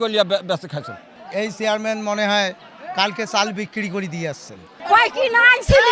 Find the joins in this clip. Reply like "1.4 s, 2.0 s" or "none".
1.1 s, 4.7 s